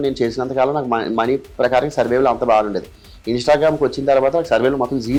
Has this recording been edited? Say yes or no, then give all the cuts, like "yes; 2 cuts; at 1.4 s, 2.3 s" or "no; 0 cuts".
no; 0 cuts